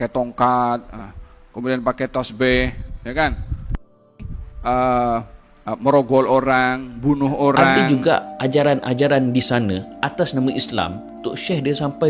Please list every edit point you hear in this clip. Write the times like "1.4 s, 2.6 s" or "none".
7.7 s